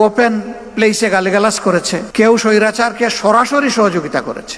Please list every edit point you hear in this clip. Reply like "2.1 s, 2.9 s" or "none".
2.1 s